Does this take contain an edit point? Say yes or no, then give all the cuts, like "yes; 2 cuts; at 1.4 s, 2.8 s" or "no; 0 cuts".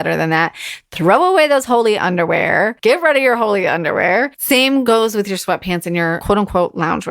yes; 3 cuts; at 2.8 s, 4.8 s, 6.2 s